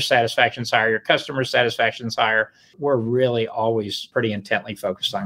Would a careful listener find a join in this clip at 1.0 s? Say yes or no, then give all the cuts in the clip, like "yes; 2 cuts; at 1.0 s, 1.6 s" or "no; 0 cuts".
no; 2 cuts; at 2.7 s, 4.0 s